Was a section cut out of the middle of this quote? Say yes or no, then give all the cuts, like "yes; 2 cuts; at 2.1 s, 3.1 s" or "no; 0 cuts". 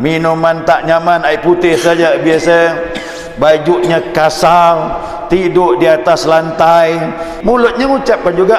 yes; 1 cut; at 7.3 s